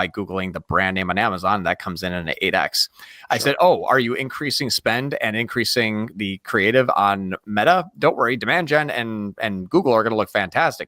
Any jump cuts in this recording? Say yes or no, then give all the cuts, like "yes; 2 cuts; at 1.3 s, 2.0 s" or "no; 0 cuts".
no; 0 cuts